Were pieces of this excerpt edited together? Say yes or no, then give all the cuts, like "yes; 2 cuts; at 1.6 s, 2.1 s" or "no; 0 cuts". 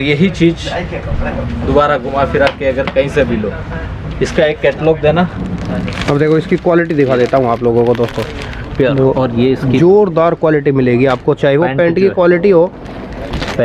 no; 0 cuts